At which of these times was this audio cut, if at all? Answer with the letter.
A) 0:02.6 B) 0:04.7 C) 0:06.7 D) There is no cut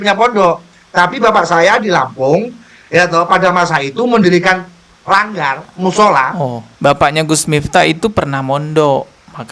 C